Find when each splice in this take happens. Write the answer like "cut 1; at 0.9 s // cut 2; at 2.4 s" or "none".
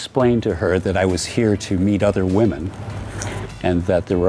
none